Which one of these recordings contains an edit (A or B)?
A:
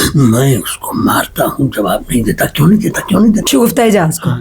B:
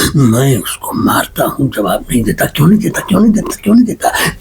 A